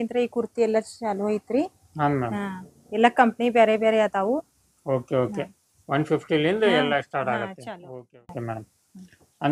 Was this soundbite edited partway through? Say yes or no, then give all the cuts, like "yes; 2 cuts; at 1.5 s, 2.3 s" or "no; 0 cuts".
no; 0 cuts